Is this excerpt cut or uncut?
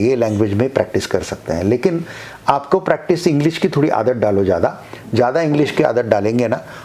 uncut